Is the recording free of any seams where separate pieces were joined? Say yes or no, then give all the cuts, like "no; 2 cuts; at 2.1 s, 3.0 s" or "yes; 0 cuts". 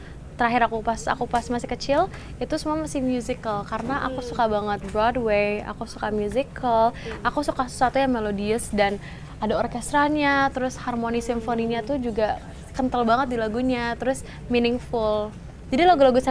yes; 0 cuts